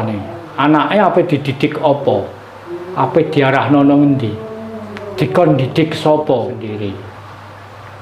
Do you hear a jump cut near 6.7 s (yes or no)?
yes